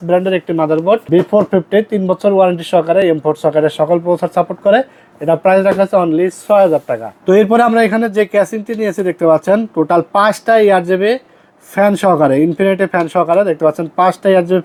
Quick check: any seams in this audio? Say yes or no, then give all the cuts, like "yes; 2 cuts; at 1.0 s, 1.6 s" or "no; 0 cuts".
no; 0 cuts